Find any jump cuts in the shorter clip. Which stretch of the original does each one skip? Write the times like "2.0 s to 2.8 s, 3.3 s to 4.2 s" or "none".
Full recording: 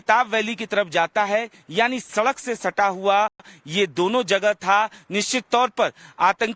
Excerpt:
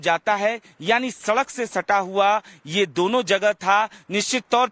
3.5 s to 3.6 s

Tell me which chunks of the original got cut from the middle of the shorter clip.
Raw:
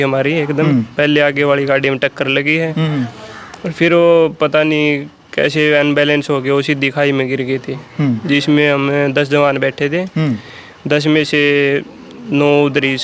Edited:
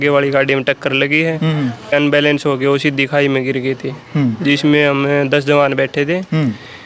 3.3 s to 5.8 s

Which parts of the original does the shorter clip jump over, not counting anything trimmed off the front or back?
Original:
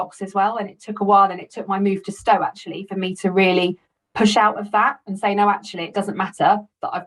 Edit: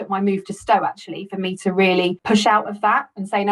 3.8 s to 4.1 s

